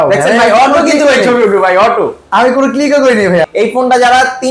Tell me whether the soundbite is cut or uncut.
cut